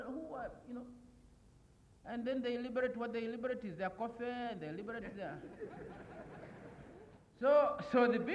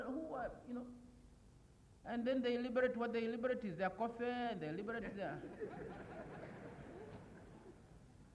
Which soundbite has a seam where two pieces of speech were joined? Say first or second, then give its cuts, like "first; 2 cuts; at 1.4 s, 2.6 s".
first; 1 cut; at 7.2 s